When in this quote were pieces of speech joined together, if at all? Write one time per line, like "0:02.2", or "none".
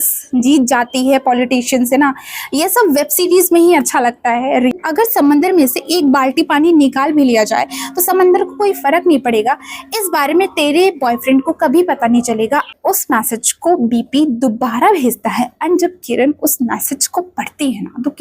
0:04.7
0:12.7